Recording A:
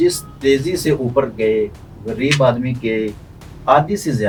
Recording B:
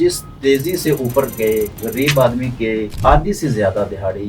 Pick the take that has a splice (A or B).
B